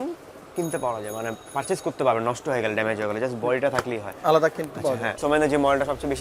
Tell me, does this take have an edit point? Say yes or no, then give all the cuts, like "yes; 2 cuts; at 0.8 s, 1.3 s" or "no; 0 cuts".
yes; 1 cut; at 5.2 s